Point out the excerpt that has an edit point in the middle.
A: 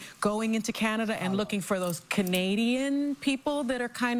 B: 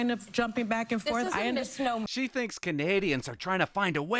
B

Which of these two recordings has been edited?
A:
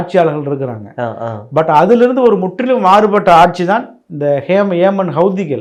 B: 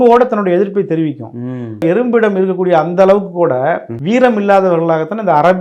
B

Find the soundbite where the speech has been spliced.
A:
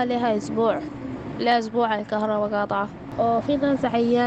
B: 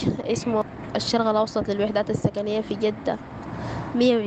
A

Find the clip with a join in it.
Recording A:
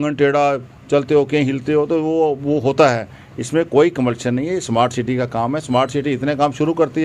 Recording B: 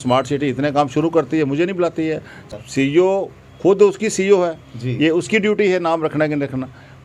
B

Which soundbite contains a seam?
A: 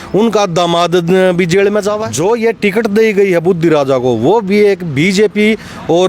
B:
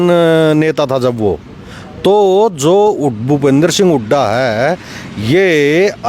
A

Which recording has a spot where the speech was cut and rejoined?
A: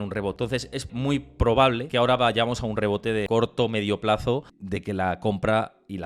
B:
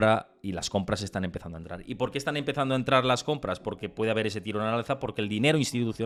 A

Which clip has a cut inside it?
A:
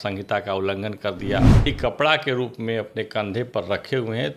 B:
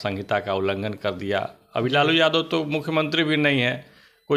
A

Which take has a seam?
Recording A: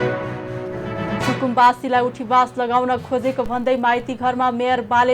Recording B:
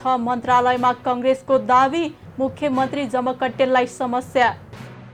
A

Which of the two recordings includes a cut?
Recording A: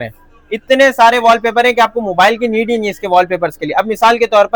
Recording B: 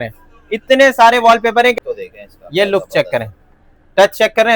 B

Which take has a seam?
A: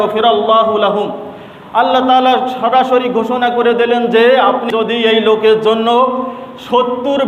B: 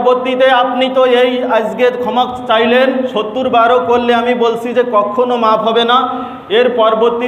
A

